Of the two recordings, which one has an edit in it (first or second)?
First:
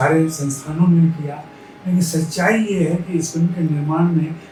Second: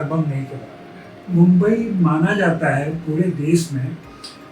second